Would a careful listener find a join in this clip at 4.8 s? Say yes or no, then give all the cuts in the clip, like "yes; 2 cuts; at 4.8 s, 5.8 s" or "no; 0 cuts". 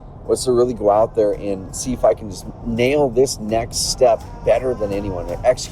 yes; 1 cut; at 4.8 s